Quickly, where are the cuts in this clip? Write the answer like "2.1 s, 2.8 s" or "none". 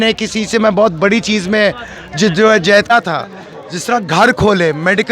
2.9 s